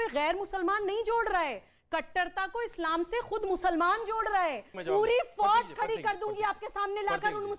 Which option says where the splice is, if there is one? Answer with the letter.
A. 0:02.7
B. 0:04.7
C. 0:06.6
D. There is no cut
B